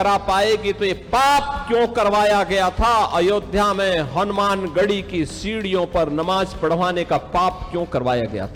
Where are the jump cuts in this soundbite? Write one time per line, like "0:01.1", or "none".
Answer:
none